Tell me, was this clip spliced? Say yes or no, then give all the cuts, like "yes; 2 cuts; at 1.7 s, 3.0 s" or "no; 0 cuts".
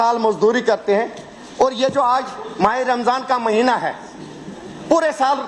no; 0 cuts